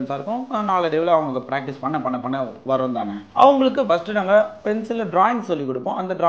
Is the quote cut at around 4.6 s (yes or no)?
yes